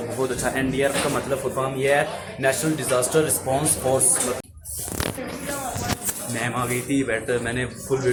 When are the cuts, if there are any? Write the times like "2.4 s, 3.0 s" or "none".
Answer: none